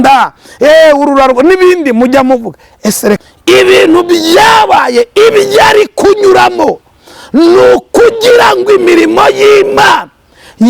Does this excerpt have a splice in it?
yes; 1 cut; at 3.2 s

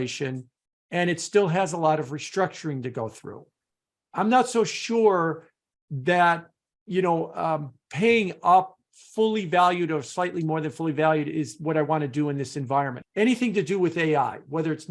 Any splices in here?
yes; 1 cut; at 13.0 s

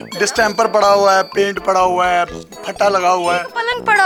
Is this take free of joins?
yes; 0 cuts

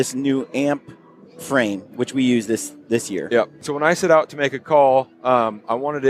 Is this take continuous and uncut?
no; 1 cut; at 3.6 s

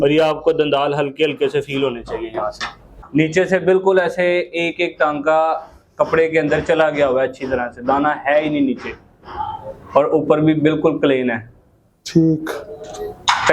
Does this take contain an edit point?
yes; 1 cut; at 2.9 s

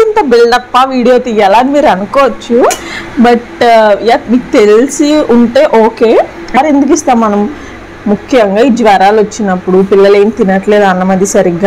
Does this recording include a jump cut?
yes; 1 cut; at 6.6 s

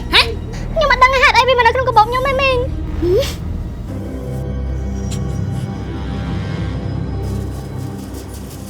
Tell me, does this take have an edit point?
no; 0 cuts

